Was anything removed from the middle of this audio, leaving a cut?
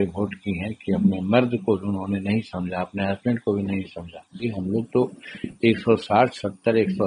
yes; 1 cut; at 4.4 s

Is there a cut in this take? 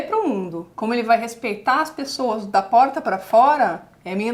no; 0 cuts

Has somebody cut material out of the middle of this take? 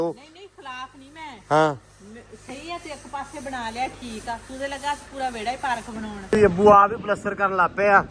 yes; 1 cut; at 6.2 s

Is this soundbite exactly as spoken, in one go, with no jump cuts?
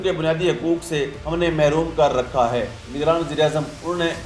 no; 1 cut; at 2.8 s

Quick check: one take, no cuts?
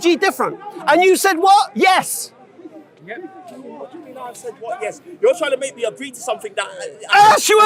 yes; 0 cuts

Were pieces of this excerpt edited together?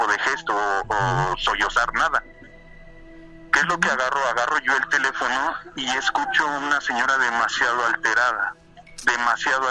no; 0 cuts

